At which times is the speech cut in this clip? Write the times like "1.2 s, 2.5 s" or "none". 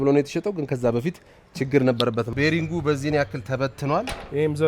2.3 s